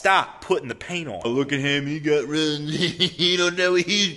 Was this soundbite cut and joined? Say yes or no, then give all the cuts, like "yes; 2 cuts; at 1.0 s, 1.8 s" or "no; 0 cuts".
yes; 1 cut; at 1.3 s